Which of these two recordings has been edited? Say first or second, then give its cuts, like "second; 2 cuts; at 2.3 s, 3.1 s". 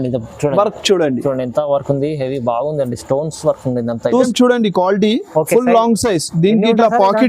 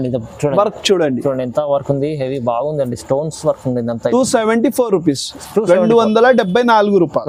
first; 1 cut; at 4.3 s